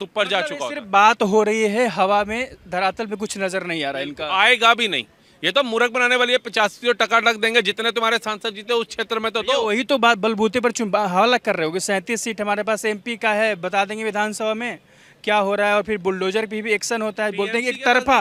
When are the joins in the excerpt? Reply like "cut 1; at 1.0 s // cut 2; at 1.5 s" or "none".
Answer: none

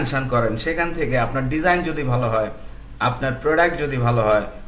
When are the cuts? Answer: none

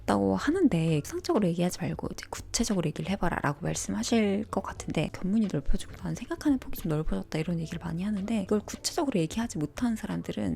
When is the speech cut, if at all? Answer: cut 1; at 1.1 s // cut 2; at 5.1 s // cut 3; at 8.4 s

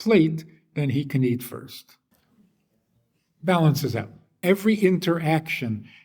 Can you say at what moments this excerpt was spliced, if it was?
cut 1; at 2.1 s // cut 2; at 4.3 s

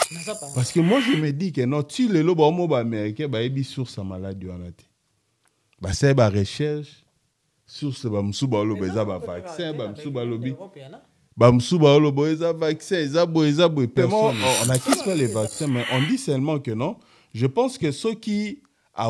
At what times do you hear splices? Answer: cut 1; at 13.9 s

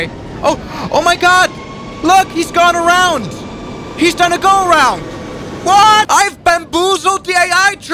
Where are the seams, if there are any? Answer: none

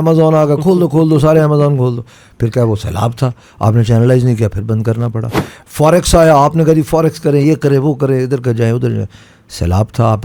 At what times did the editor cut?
none

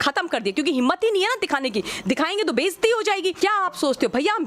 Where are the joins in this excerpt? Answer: cut 1; at 3.4 s

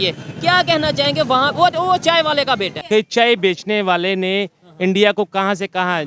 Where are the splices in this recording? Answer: cut 1; at 2.9 s

